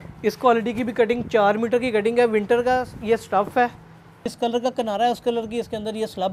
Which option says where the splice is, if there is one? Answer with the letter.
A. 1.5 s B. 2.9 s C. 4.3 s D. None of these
C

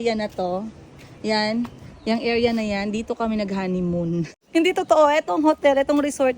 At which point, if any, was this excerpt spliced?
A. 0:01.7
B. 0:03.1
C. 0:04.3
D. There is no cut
C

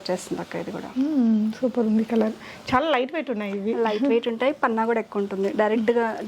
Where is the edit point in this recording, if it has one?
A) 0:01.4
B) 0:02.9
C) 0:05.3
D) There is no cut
D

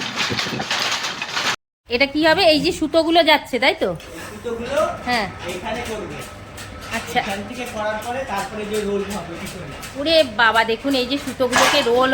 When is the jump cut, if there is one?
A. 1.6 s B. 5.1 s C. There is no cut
A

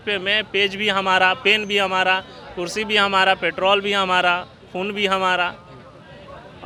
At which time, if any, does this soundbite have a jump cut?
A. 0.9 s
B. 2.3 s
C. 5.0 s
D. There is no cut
D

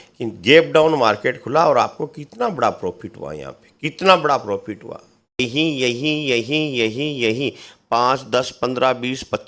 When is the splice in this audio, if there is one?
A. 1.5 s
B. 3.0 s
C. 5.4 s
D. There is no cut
C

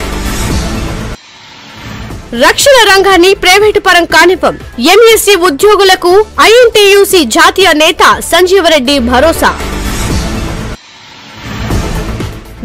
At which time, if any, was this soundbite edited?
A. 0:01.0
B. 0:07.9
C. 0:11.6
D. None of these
A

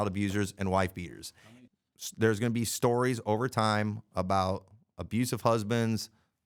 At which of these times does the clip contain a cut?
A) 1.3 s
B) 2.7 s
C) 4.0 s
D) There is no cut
A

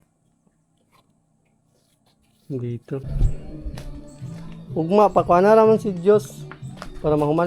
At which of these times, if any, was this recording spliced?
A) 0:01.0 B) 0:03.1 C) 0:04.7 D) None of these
B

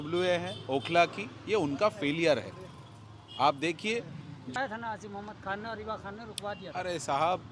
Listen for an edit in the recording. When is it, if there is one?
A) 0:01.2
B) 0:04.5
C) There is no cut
B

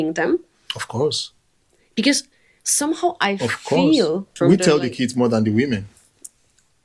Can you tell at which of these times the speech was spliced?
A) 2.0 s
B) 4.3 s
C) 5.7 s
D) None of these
B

